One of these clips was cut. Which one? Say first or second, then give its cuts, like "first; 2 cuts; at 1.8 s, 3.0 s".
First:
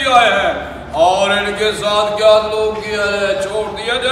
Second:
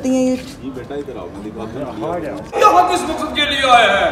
second; 1 cut; at 2.5 s